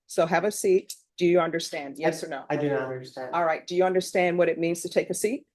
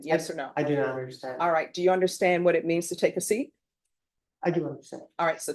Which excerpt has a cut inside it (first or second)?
first